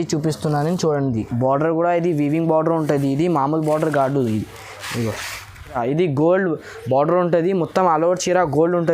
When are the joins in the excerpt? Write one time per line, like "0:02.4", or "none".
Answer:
0:05.8